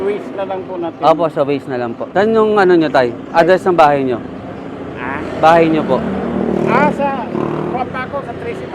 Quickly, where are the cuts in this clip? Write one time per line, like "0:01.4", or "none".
0:02.0